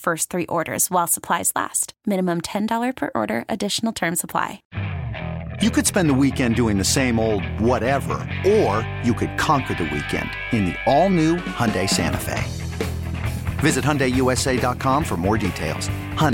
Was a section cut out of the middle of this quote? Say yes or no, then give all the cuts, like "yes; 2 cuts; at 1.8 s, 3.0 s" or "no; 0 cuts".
yes; 1 cut; at 4.6 s